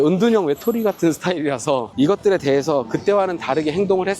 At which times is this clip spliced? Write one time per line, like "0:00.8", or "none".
0:01.9